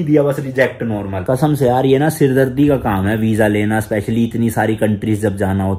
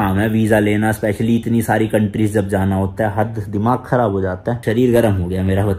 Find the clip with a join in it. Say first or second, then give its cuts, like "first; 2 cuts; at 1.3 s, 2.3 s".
first; 1 cut; at 1.2 s